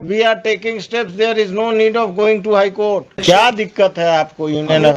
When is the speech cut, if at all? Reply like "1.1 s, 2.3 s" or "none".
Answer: 3.2 s